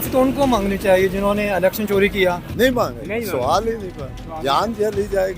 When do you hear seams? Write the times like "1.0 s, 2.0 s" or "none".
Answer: 2.5 s